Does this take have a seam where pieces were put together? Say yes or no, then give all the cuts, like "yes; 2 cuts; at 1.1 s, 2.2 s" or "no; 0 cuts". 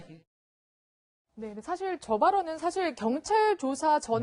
yes; 1 cut; at 2.3 s